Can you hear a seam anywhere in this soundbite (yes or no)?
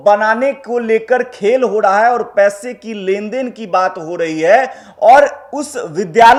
no